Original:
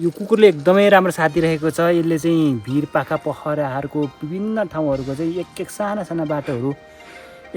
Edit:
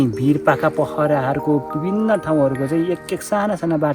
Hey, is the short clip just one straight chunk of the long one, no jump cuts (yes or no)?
yes